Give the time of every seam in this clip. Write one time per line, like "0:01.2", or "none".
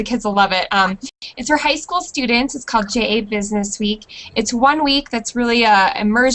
0:02.1